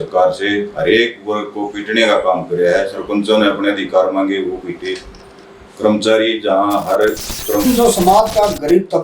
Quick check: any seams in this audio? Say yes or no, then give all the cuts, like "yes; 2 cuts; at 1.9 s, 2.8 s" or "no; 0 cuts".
yes; 1 cut; at 7.6 s